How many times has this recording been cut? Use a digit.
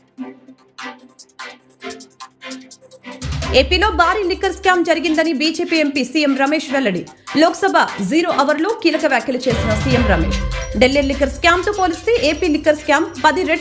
1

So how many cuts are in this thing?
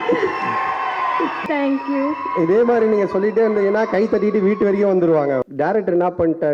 2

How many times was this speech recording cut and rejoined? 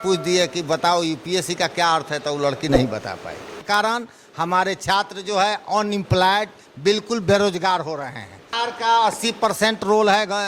2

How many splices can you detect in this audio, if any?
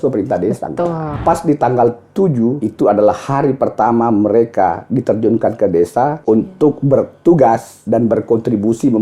4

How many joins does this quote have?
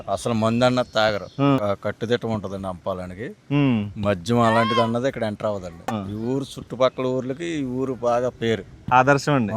2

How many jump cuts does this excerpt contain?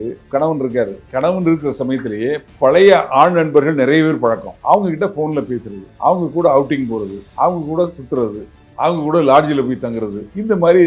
0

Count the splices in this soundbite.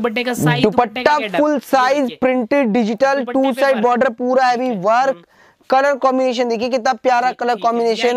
0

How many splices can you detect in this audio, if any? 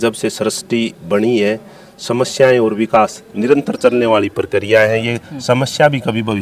0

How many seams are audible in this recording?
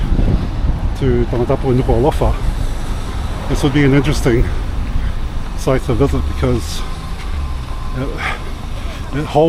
0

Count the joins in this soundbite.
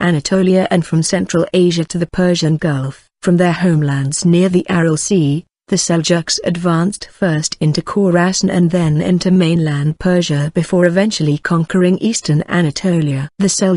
1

